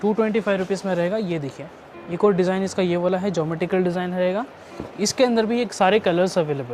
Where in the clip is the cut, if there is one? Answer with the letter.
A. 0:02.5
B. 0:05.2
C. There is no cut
C